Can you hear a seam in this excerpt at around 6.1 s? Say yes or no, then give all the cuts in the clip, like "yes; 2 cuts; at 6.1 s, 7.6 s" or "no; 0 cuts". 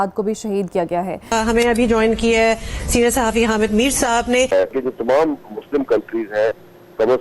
no; 2 cuts; at 1.3 s, 4.5 s